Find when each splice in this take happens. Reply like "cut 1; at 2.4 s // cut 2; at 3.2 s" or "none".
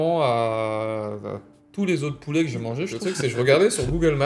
cut 1; at 2.9 s